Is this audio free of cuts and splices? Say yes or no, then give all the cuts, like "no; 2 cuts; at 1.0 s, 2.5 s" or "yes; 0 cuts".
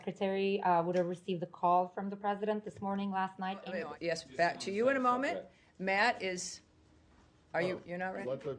no; 1 cut; at 3.7 s